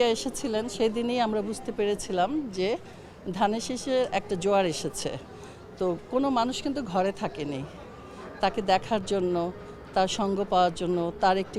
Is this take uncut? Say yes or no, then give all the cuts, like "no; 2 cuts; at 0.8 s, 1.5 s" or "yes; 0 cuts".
yes; 0 cuts